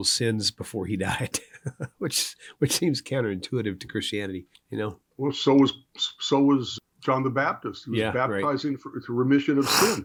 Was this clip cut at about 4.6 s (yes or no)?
no